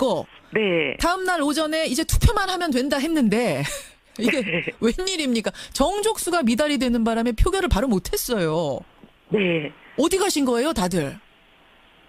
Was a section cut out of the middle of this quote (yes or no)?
yes